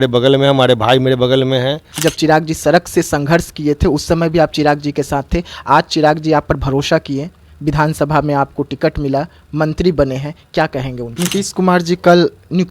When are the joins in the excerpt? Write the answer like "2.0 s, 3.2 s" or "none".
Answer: 1.8 s, 11.1 s